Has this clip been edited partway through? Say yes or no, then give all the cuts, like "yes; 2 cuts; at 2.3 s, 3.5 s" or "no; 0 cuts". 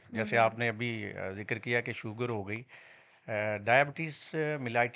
no; 0 cuts